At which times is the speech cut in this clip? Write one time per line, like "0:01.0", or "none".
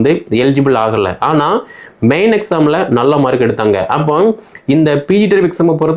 none